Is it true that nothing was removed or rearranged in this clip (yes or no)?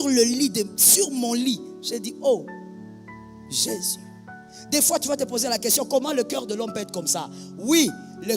no